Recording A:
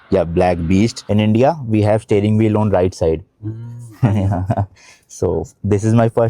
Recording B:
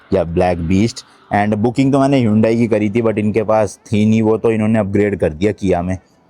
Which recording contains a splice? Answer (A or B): A